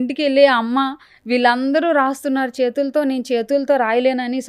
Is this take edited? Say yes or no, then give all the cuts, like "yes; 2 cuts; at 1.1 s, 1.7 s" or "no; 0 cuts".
no; 0 cuts